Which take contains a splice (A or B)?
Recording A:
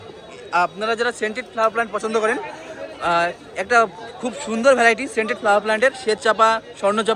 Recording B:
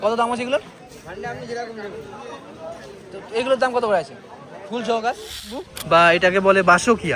B